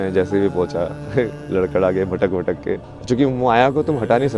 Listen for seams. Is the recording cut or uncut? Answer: cut